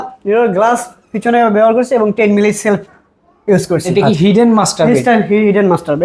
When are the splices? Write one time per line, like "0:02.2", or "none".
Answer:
0:03.9